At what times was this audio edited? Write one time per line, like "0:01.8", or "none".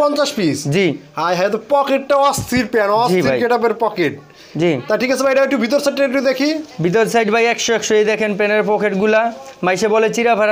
none